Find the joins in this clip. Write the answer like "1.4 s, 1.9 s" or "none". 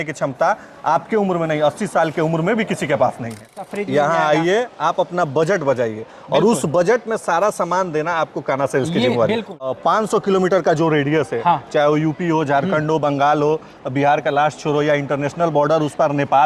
3.7 s, 9.7 s